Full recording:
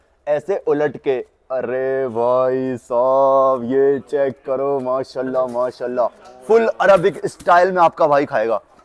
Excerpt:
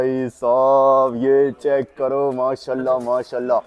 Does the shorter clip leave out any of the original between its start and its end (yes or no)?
no